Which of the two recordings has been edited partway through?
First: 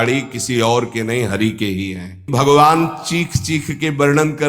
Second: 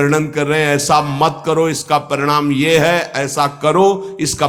first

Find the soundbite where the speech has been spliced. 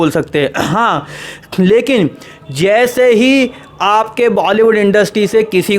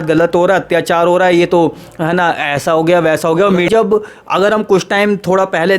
second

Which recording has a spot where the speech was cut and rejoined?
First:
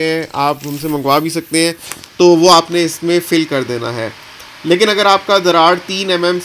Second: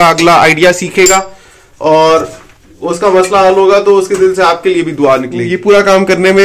second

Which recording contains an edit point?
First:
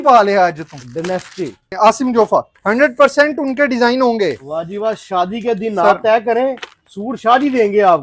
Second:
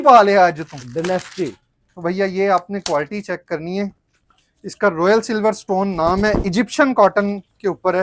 first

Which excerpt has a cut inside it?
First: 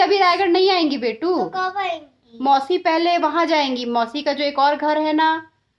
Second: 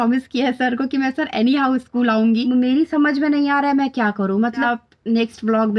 second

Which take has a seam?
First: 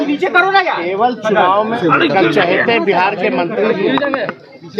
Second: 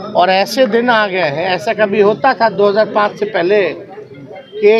first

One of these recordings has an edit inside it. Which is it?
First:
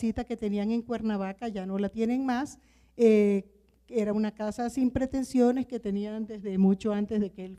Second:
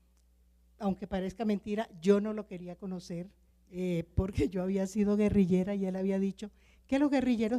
second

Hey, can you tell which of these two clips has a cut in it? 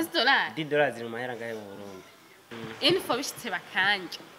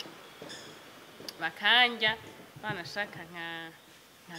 first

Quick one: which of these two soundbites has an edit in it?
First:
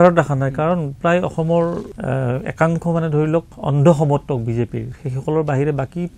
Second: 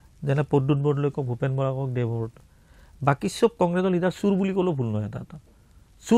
first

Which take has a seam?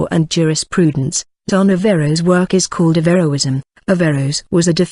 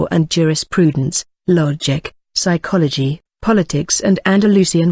second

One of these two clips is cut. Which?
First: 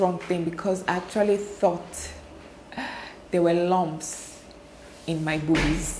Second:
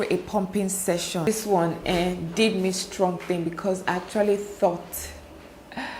second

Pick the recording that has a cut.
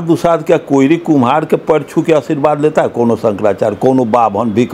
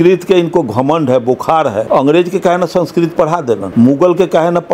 second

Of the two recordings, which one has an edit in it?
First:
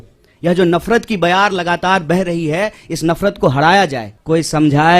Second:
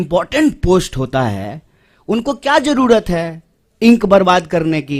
first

